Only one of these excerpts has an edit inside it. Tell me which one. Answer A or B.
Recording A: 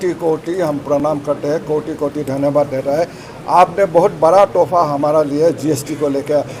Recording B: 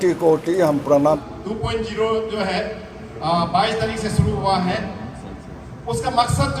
B